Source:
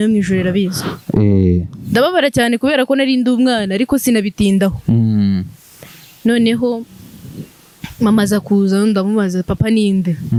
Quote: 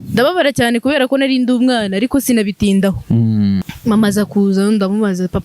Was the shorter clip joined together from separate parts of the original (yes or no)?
yes